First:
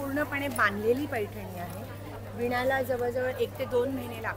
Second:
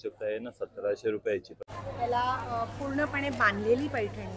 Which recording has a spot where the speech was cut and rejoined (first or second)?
second